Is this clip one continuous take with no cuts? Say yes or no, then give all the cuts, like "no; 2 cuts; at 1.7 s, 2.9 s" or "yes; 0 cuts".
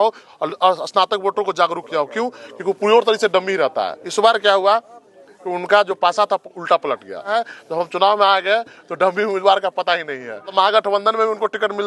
no; 3 cuts; at 4.0 s, 7.3 s, 10.5 s